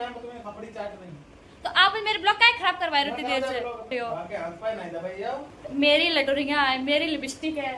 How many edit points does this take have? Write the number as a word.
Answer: two